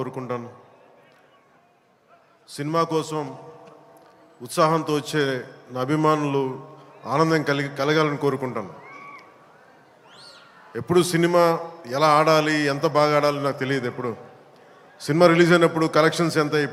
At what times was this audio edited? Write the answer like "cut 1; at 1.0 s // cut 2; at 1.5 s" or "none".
none